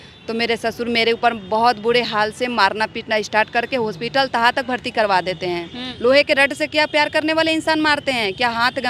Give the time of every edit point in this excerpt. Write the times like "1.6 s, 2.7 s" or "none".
5.8 s